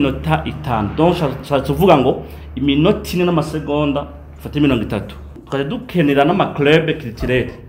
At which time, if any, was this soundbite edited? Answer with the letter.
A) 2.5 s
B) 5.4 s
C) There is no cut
B